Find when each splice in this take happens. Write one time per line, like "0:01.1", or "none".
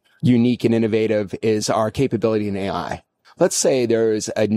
0:03.2